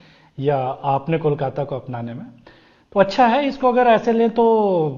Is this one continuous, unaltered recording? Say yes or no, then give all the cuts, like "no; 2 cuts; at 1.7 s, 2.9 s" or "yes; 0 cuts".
yes; 0 cuts